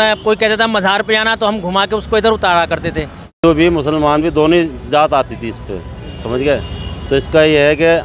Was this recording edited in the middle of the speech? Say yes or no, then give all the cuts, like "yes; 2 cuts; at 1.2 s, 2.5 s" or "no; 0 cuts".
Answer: yes; 1 cut; at 3.4 s